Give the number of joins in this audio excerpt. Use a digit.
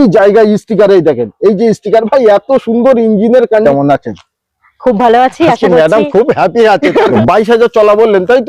2